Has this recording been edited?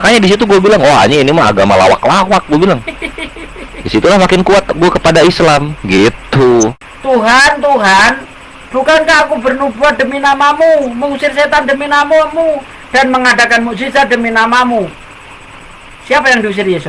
yes; 1 cut; at 6.8 s

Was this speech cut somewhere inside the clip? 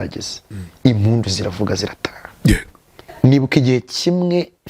yes; 1 cut; at 3.0 s

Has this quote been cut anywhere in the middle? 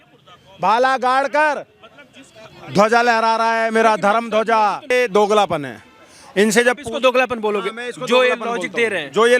yes; 1 cut; at 4.9 s

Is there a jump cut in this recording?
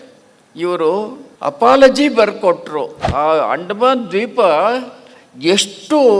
yes; 2 cuts; at 1.2 s, 3.0 s

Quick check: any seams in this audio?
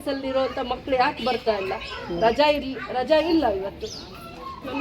no; 0 cuts

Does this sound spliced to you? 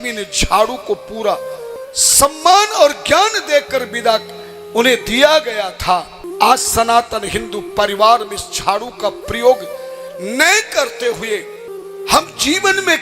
yes; 3 cuts; at 1.8 s, 6.2 s, 11.7 s

